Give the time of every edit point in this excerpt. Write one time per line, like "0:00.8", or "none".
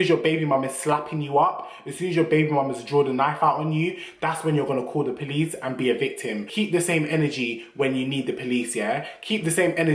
none